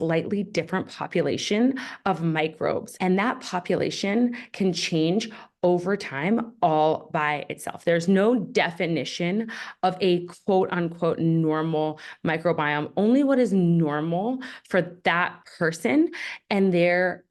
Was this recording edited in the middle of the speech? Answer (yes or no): no